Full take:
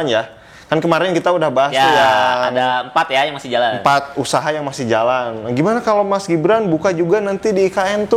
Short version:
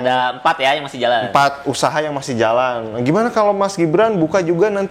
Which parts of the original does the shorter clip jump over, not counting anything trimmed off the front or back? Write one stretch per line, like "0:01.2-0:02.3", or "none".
none